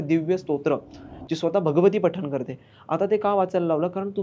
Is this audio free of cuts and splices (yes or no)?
yes